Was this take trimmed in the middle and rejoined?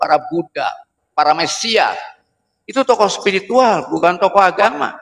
no; 0 cuts

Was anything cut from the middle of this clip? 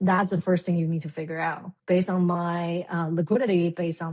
no; 0 cuts

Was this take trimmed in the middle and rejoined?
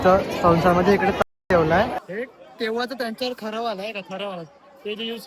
yes; 1 cut; at 2.0 s

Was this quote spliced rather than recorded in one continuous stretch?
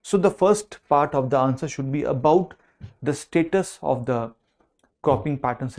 no; 0 cuts

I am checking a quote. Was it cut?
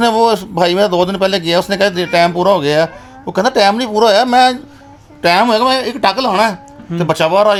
no; 0 cuts

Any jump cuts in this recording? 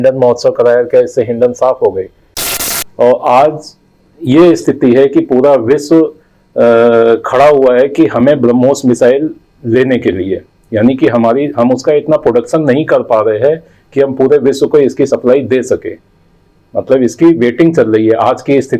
yes; 1 cut; at 2.5 s

